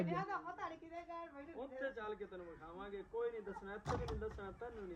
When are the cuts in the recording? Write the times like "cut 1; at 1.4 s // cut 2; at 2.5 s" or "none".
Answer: none